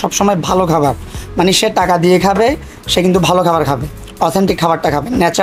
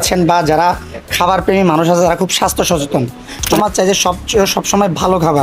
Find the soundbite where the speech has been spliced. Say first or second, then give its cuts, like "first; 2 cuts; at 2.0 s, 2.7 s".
second; 1 cut; at 3.5 s